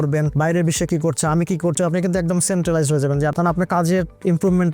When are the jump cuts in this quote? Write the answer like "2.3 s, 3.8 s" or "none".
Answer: 1.8 s, 3.3 s